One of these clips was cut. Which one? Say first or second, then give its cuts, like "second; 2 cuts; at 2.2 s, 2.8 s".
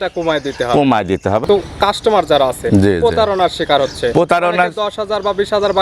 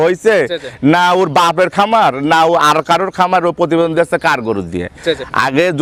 first; 1 cut; at 1.4 s